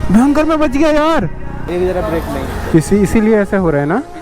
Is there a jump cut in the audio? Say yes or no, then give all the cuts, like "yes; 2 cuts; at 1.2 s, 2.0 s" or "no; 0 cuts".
yes; 1 cut; at 1.7 s